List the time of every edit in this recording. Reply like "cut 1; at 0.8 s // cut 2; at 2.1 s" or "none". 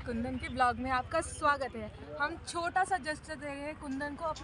none